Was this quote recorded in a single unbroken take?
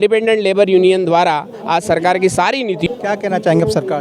no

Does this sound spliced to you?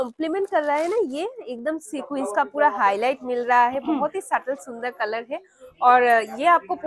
no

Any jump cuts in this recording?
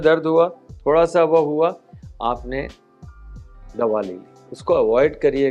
no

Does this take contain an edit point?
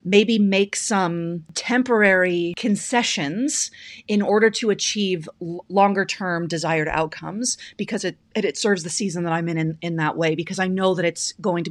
yes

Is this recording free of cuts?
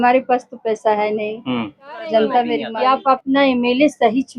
no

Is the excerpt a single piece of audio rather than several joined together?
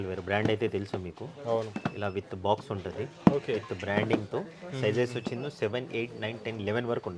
yes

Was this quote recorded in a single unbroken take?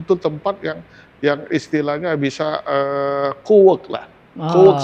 yes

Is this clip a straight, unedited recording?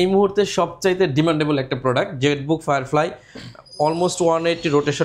yes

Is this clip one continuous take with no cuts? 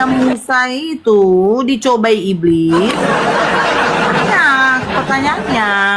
no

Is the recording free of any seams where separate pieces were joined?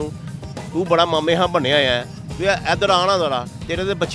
yes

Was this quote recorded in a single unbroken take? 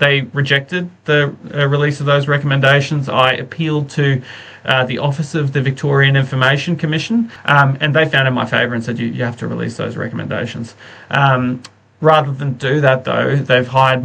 no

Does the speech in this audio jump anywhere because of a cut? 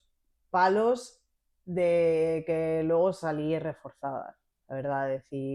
no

